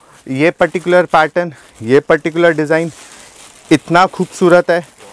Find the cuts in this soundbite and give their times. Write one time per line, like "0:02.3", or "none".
none